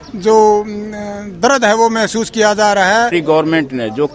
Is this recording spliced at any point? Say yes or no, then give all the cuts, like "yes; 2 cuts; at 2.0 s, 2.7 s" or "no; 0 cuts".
yes; 1 cut; at 3.1 s